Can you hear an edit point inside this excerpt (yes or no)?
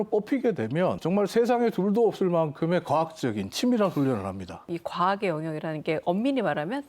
yes